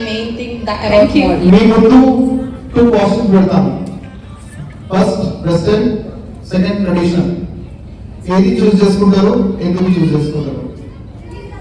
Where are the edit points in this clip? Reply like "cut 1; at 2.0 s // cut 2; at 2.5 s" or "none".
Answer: cut 1; at 1.4 s